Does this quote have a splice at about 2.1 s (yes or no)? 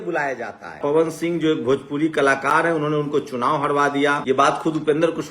no